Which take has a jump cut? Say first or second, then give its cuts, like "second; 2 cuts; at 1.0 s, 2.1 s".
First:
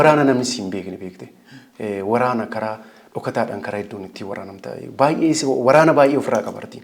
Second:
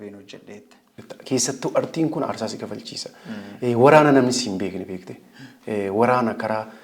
second; 1 cut; at 1.0 s